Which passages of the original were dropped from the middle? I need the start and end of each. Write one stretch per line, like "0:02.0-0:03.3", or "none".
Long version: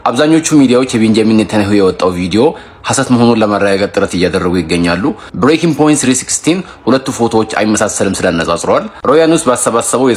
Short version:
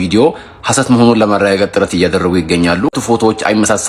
0:05.2-0:07.1